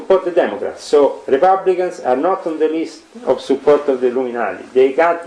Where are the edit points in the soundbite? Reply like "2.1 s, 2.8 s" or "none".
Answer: none